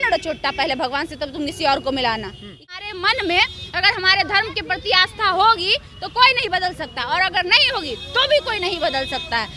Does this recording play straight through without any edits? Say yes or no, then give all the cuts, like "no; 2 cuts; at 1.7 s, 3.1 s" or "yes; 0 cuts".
no; 1 cut; at 2.6 s